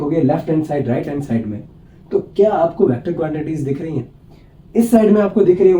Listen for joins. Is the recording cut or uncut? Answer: uncut